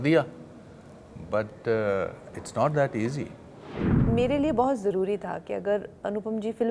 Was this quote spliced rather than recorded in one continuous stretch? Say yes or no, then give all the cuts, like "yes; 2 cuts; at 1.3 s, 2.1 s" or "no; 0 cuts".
yes; 1 cut; at 3.9 s